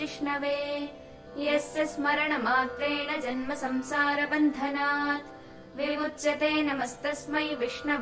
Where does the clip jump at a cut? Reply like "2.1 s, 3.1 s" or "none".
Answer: none